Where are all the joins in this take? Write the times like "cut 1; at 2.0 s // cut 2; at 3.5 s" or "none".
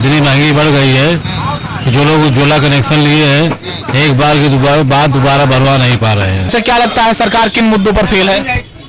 cut 1; at 6.5 s

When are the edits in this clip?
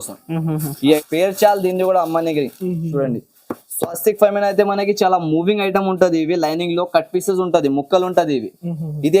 cut 1; at 1.0 s

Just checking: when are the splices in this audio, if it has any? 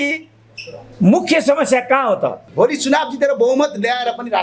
cut 1; at 2.4 s

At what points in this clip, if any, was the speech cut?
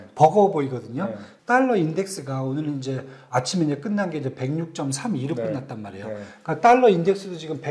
cut 1; at 1.2 s

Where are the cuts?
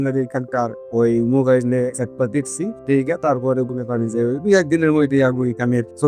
none

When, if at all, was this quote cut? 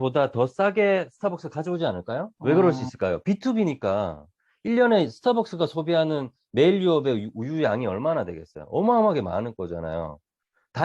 cut 1; at 2.3 s

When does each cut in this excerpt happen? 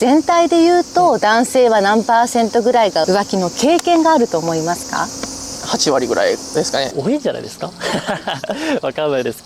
none

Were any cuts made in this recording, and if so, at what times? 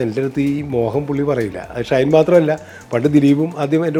none

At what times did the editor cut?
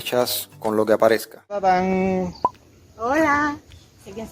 cut 1; at 1.7 s

